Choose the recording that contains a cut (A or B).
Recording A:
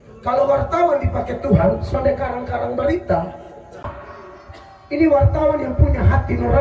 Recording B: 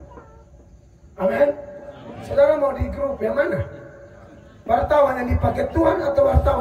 A